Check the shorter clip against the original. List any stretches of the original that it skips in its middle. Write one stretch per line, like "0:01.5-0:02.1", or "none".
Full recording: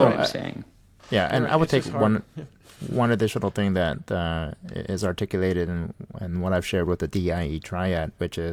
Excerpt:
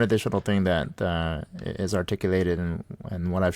none